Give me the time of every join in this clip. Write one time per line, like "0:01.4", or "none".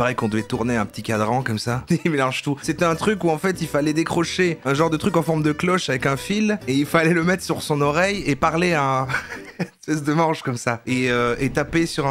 0:01.8
0:02.6